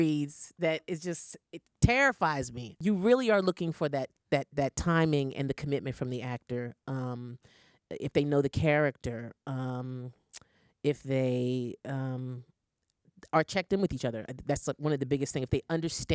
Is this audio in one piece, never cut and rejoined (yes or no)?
no